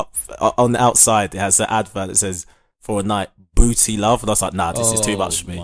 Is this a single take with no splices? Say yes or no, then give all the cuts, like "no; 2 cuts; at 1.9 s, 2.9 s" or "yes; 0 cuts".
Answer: yes; 0 cuts